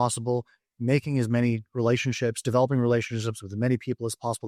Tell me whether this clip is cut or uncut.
uncut